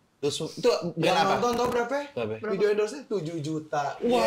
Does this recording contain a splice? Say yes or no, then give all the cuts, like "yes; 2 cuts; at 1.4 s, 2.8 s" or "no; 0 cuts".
no; 0 cuts